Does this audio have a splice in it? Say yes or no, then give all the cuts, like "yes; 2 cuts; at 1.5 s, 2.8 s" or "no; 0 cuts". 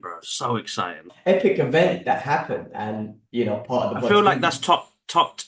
yes; 1 cut; at 1.1 s